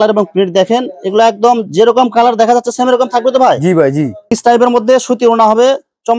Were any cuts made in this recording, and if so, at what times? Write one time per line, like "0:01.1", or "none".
0:04.4